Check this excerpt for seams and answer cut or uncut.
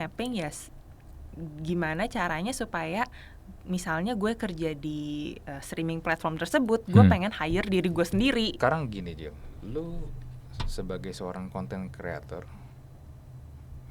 cut